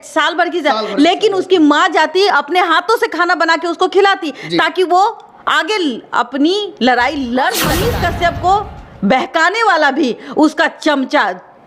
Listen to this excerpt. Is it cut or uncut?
cut